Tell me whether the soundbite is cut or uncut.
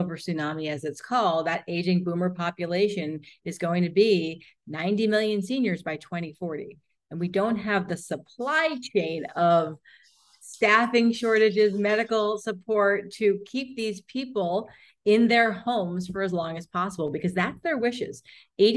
uncut